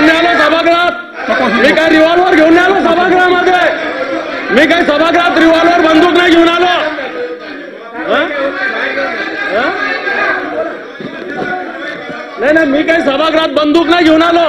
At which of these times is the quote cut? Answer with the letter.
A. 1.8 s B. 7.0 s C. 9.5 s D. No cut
D